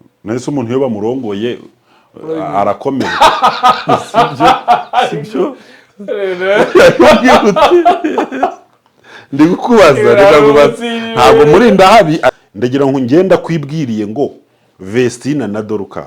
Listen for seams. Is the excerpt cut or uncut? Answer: cut